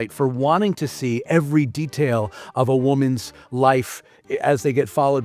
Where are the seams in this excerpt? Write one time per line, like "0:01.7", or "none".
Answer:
none